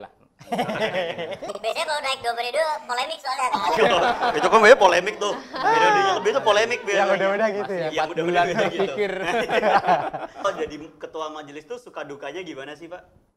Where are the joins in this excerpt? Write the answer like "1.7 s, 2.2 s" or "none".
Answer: 10.4 s